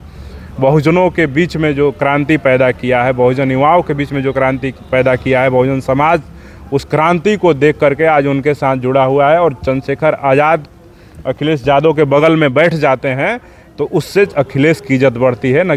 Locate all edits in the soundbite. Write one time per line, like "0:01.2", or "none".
none